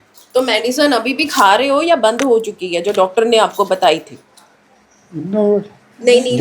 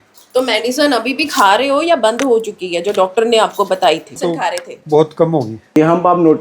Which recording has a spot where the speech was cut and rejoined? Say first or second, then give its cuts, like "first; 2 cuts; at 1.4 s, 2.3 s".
second; 2 cuts; at 4.2 s, 5.6 s